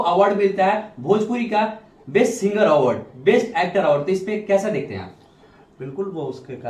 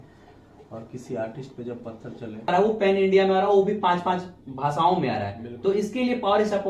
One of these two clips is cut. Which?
second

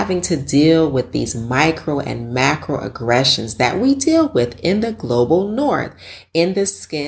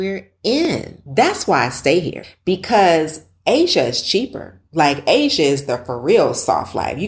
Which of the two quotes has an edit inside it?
second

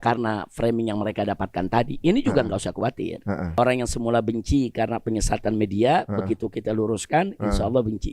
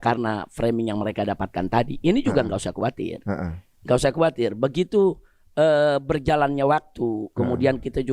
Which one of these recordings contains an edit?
first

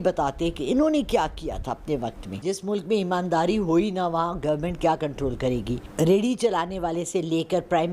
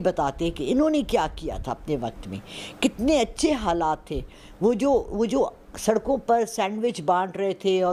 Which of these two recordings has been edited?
first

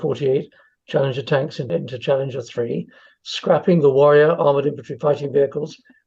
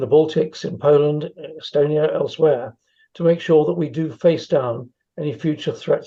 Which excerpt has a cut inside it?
first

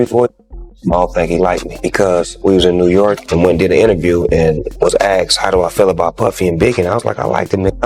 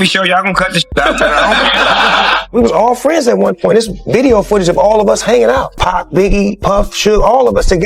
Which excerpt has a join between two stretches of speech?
second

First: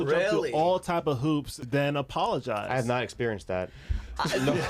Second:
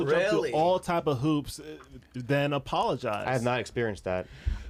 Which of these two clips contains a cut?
first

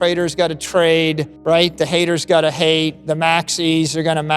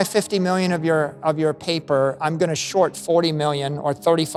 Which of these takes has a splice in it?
first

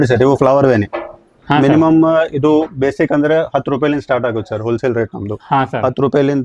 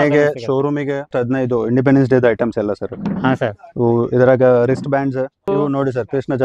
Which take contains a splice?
second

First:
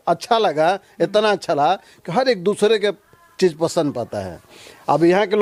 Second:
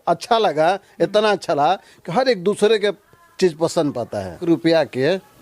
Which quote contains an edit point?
second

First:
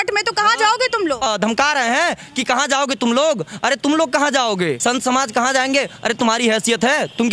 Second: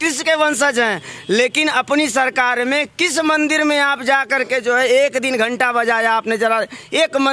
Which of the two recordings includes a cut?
first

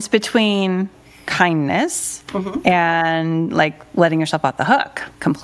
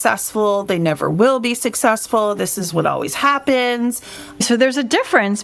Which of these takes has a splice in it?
second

